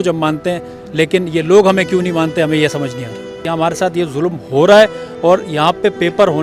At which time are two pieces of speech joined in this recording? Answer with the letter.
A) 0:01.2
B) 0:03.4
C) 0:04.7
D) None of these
B